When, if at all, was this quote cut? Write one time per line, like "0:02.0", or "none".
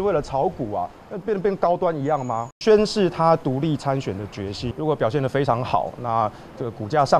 0:02.5
0:04.7